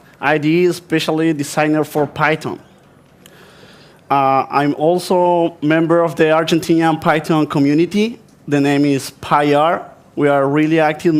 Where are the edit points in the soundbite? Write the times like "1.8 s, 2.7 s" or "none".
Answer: none